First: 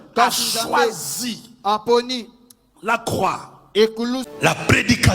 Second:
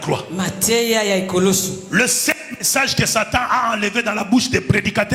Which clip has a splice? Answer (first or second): first